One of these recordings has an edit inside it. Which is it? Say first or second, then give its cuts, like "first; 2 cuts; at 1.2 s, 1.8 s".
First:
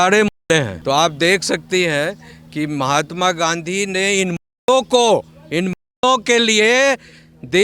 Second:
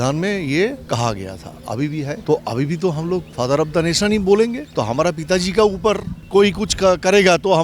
second; 5 cuts; at 0.8 s, 2.2 s, 3.3 s, 4.6 s, 6.1 s